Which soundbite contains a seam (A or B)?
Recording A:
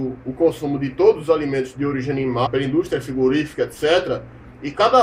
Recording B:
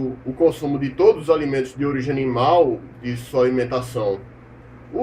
B